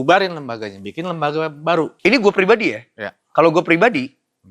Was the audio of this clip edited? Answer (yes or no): yes